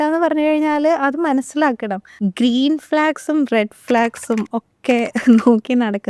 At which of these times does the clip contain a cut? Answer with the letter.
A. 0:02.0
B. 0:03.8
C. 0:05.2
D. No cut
A